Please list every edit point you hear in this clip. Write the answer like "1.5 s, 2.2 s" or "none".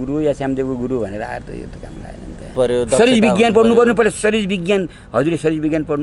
2.5 s